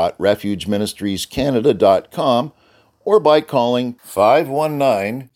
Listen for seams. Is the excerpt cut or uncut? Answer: uncut